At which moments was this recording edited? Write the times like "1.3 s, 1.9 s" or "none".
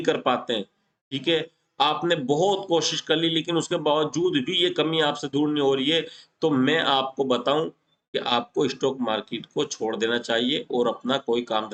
none

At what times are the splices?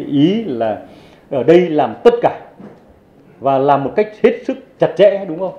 none

